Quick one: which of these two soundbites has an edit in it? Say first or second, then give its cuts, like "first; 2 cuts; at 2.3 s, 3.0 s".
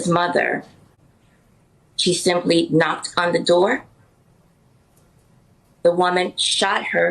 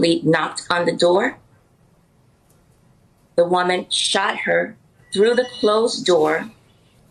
first; 1 cut; at 0.9 s